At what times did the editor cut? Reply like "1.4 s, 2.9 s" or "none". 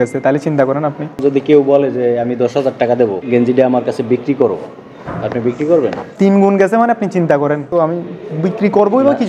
1.2 s, 3.2 s, 6.0 s, 7.7 s